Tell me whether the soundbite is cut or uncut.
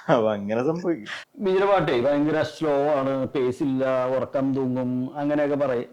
cut